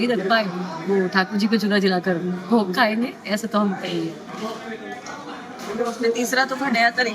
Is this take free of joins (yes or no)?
yes